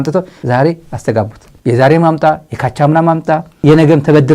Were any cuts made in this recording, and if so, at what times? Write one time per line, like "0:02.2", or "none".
none